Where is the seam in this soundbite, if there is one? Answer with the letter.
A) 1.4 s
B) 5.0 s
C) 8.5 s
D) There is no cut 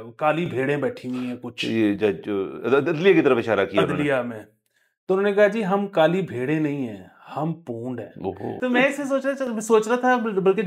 C